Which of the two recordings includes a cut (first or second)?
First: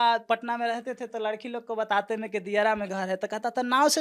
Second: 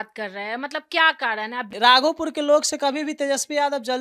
second